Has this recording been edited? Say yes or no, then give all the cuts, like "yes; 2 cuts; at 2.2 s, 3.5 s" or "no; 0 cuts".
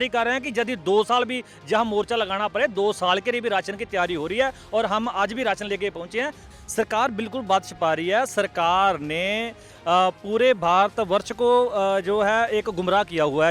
yes; 1 cut; at 6.4 s